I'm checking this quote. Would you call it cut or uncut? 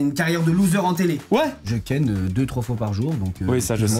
cut